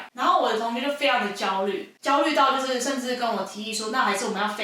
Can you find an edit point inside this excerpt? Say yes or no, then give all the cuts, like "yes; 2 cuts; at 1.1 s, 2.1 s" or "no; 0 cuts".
yes; 1 cut; at 2.0 s